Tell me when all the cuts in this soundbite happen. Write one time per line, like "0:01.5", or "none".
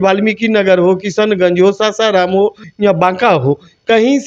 0:02.6